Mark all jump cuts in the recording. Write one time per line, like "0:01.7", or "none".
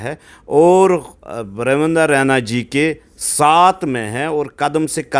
none